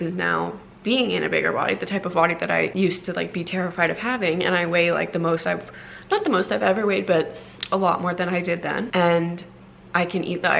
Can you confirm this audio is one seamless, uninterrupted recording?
no; 2 cuts; at 2.7 s, 8.9 s

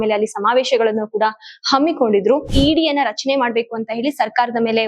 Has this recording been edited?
yes; 1 cut; at 2.5 s

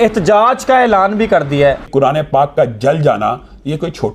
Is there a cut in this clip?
yes; 1 cut; at 1.9 s

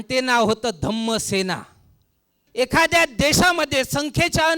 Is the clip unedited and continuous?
no; 1 cut; at 2.4 s

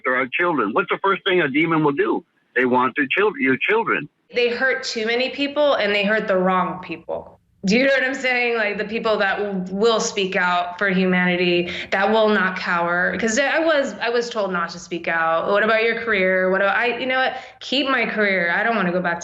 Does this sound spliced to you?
yes; 1 cut; at 4.3 s

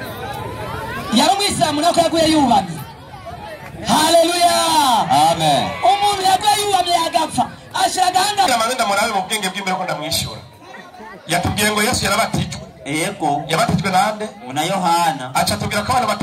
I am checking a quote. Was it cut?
yes; 1 cut; at 8.5 s

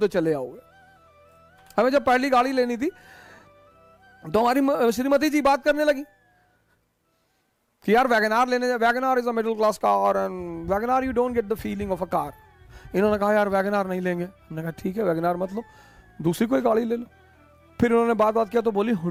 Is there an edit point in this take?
no; 0 cuts

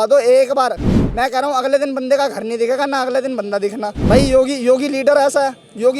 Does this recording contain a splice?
yes; 1 cut; at 4.0 s

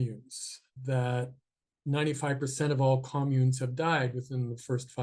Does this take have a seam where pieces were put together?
no; 0 cuts

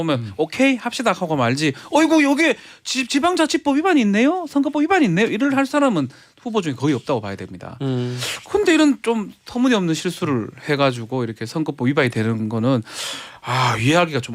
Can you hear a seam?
no; 0 cuts

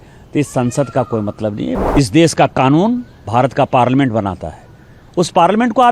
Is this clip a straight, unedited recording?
no; 1 cut; at 1.8 s

